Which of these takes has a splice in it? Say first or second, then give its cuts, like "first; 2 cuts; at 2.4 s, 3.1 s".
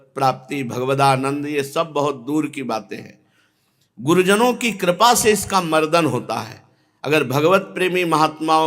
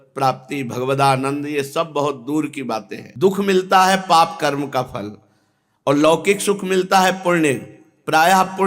second; 1 cut; at 3.0 s